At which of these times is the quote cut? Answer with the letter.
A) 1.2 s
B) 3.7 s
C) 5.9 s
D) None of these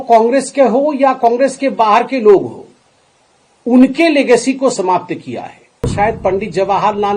C